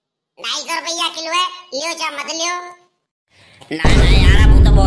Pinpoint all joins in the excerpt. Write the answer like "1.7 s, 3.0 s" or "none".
3.8 s